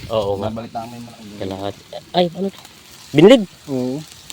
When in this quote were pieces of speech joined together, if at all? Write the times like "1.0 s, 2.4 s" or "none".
0.9 s